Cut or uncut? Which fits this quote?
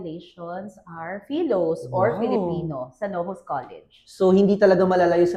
uncut